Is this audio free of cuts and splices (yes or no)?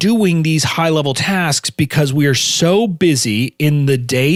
yes